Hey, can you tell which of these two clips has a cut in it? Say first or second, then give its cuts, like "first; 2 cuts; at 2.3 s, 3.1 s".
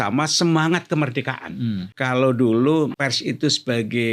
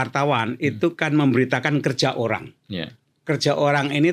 first; 2 cuts; at 1.9 s, 3.0 s